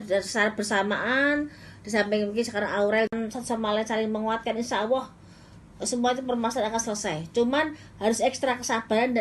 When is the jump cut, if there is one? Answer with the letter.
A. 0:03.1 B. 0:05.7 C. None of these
A